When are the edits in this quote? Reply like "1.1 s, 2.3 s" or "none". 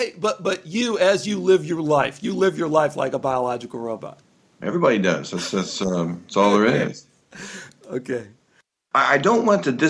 8.7 s